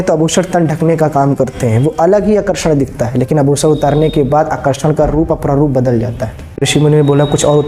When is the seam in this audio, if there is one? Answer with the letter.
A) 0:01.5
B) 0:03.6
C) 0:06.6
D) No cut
C